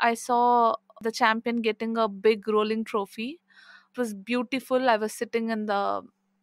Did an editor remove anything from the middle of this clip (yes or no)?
yes